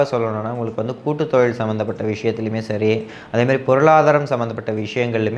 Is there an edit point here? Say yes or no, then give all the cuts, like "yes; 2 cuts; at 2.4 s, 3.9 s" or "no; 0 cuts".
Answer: no; 0 cuts